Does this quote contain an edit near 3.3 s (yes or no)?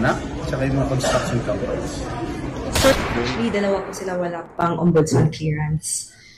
yes